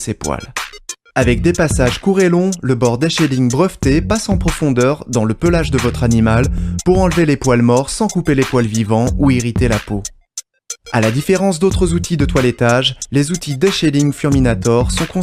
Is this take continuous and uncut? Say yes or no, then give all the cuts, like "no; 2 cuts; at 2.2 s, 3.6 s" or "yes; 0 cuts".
yes; 0 cuts